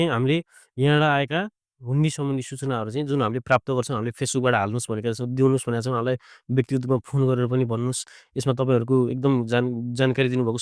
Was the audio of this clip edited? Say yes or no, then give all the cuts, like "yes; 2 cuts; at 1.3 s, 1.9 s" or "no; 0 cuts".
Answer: no; 0 cuts